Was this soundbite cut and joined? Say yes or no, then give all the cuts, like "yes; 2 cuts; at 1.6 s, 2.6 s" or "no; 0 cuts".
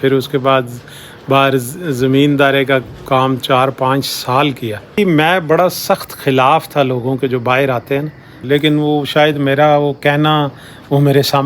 yes; 2 cuts; at 5.0 s, 8.3 s